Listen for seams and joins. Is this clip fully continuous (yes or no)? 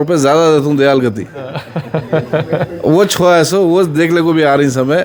yes